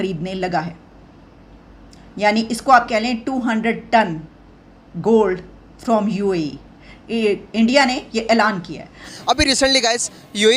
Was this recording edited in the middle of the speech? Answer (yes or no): yes